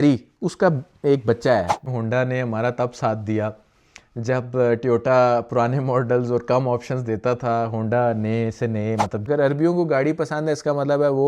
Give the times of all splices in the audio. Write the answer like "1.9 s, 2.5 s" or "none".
1.8 s, 9.2 s